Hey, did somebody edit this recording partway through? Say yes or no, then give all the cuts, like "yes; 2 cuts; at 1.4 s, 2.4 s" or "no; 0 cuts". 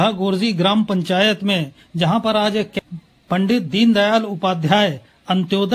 yes; 1 cut; at 2.7 s